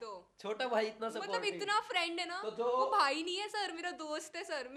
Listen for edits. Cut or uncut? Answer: uncut